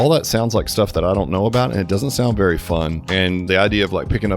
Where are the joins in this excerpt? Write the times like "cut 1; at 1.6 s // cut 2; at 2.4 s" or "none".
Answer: cut 1; at 3.5 s